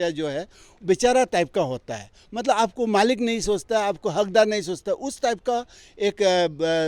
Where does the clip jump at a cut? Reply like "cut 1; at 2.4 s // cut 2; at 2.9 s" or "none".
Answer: none